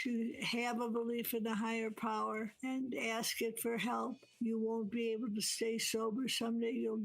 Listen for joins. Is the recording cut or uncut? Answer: cut